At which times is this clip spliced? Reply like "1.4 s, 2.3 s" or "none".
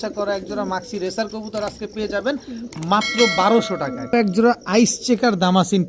4.1 s